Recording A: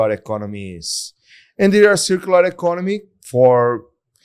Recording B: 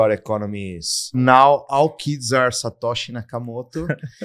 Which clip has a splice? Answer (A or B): B